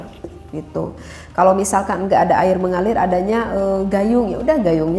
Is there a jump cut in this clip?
no; 0 cuts

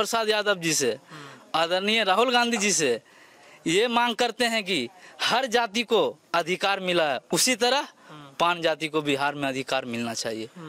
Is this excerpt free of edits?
yes; 0 cuts

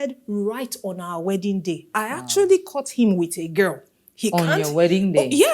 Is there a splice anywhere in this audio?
no; 0 cuts

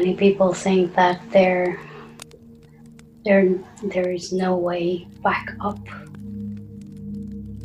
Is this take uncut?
yes; 0 cuts

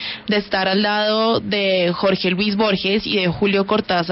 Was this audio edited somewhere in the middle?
no; 0 cuts

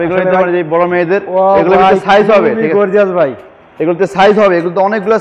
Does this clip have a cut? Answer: no; 0 cuts

